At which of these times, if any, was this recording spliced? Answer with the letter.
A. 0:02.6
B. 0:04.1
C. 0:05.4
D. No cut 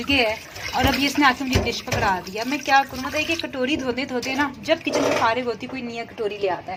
D